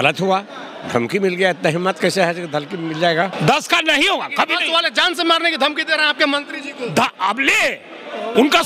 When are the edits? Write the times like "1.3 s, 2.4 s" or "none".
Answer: 3.3 s